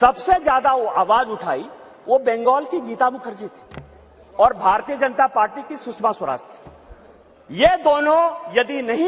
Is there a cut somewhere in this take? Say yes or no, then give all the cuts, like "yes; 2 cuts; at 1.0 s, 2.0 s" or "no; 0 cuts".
no; 0 cuts